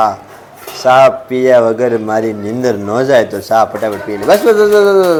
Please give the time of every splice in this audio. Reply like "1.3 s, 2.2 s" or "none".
none